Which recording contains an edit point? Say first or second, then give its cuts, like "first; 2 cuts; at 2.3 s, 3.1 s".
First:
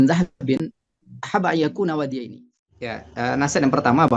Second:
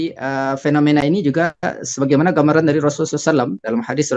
first; 1 cut; at 3.0 s